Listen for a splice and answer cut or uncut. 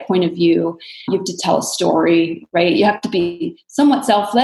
uncut